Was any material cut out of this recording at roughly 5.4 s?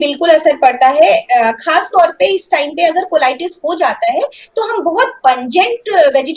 no; 0 cuts

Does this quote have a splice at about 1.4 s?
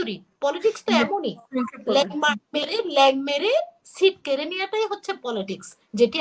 no; 0 cuts

